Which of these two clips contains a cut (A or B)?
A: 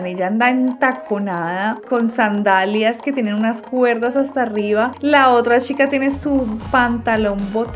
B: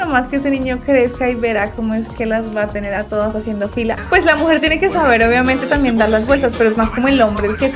B